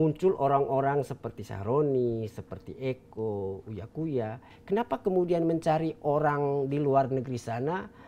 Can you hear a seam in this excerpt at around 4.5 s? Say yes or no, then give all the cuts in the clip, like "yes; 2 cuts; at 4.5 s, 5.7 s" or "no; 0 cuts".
yes; 1 cut; at 4.5 s